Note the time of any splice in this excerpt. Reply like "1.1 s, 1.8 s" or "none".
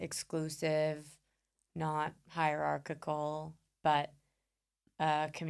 none